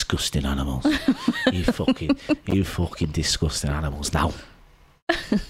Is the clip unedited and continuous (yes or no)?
yes